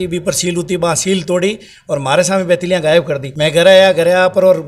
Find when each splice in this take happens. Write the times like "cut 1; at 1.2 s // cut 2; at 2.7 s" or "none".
cut 1; at 3.2 s